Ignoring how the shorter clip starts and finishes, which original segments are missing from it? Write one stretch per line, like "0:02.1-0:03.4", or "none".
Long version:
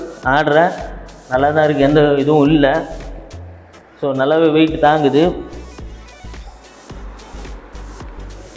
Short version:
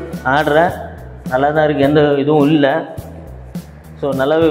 none